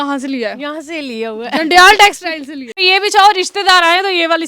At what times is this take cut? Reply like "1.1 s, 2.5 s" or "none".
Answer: 2.8 s